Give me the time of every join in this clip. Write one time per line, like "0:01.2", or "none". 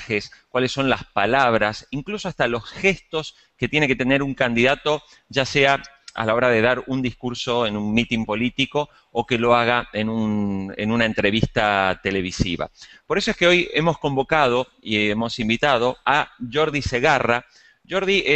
0:13.6

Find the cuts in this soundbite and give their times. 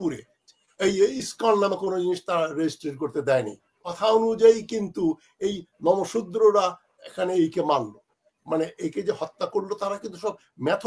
0:03.9

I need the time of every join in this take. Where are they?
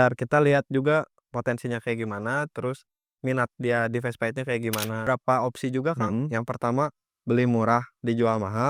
0:05.1

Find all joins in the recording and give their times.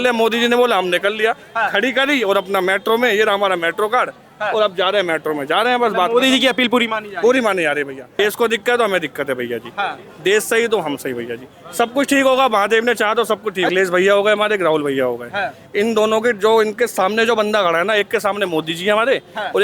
0:08.2
0:13.7

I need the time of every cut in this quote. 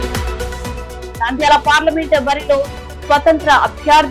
none

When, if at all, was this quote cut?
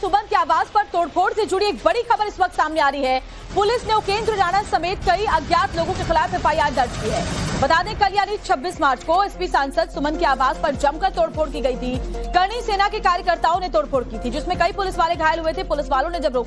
0:02.0

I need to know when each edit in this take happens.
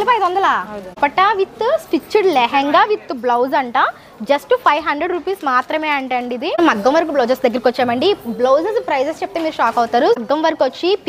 0:01.0
0:06.6
0:10.2

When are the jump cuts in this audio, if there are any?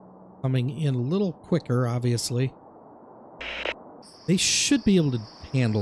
0:04.0

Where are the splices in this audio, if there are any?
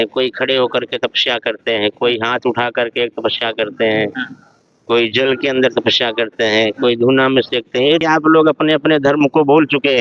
0:08.0

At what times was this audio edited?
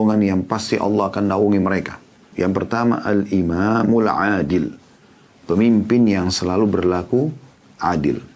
0:02.3

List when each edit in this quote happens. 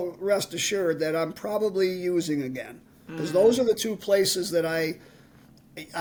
none

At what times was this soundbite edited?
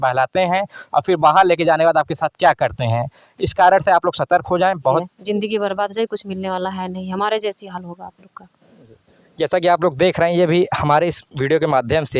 0:05.1

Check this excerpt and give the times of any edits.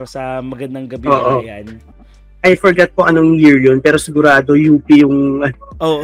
0:01.8

